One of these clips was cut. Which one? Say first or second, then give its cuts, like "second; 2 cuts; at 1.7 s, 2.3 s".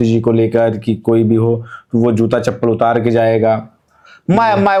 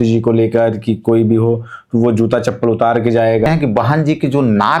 second; 1 cut; at 3.5 s